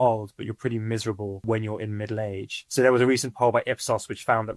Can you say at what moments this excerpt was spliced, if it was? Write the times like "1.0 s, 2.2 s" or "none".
1.4 s